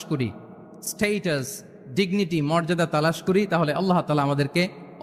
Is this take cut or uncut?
uncut